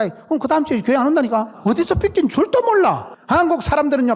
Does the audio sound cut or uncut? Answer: cut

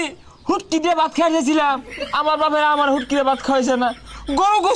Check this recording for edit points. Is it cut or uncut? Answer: uncut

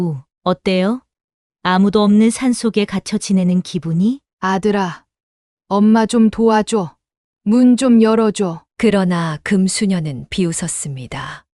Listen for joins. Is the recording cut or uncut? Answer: cut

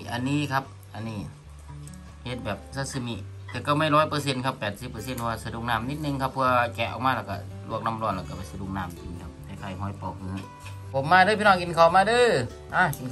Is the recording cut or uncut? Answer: cut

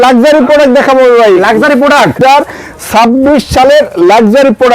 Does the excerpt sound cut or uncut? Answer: cut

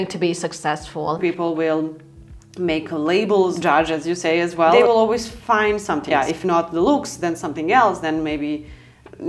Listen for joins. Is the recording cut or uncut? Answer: cut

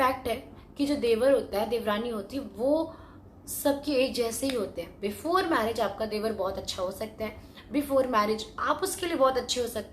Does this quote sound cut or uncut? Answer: uncut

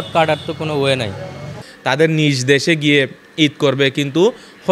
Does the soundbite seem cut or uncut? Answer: uncut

